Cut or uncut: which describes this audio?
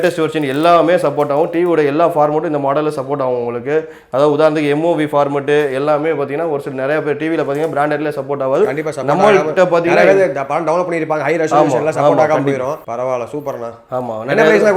uncut